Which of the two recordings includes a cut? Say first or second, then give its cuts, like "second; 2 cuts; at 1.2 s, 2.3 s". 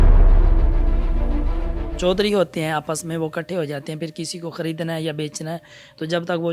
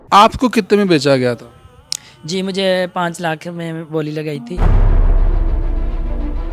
first; 1 cut; at 1.9 s